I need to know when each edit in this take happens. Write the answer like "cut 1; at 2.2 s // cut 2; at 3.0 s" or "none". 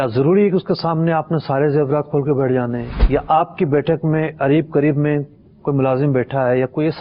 cut 1; at 3.0 s